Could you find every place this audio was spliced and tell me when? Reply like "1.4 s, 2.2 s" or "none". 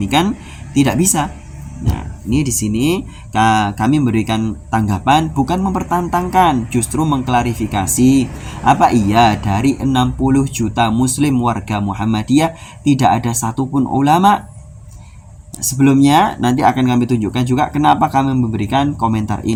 none